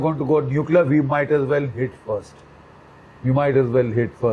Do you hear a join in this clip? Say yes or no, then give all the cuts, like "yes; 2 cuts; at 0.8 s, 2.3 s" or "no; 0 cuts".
no; 0 cuts